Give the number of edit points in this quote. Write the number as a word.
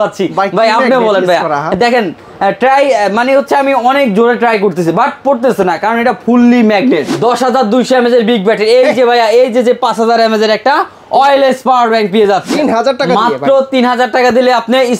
two